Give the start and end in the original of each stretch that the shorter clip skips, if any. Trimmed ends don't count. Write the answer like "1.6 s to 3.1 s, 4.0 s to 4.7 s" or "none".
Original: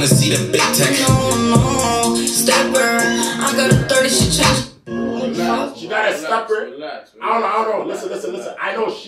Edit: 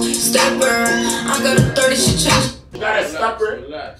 4.8 s to 5.8 s